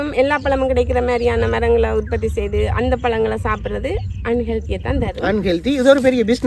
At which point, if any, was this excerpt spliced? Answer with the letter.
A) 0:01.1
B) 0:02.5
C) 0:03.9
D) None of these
D